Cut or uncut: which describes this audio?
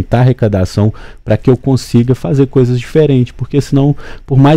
uncut